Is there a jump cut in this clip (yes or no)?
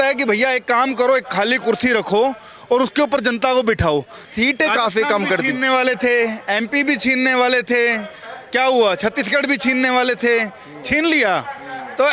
yes